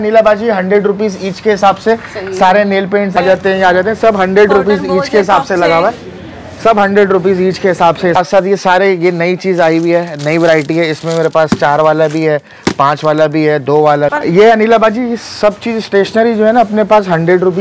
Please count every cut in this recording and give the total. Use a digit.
3